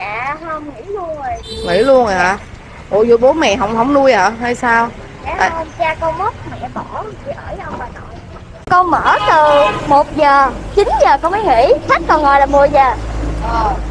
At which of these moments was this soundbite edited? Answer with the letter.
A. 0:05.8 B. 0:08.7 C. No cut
B